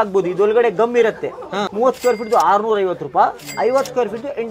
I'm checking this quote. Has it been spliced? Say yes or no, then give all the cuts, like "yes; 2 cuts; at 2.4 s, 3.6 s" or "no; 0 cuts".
yes; 2 cuts; at 1.7 s, 3.4 s